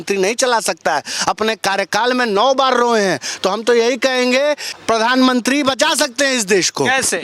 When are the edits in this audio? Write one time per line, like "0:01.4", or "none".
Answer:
0:04.7